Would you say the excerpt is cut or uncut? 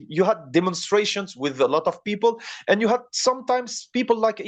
uncut